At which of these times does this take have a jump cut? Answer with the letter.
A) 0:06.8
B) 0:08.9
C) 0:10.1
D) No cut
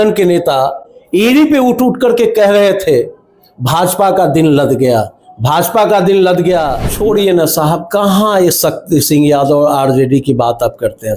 A